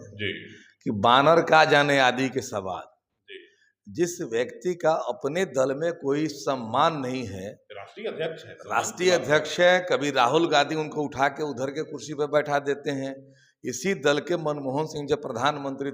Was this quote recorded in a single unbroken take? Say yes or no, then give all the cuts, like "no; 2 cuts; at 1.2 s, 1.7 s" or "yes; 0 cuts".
yes; 0 cuts